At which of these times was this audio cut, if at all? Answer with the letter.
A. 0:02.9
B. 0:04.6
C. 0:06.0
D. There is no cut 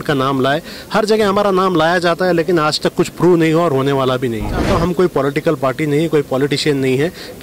B